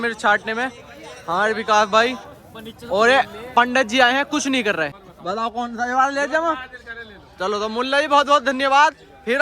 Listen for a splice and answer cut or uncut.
cut